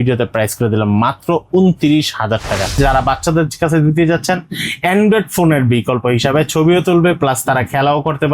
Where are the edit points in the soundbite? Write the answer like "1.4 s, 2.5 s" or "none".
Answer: 2.8 s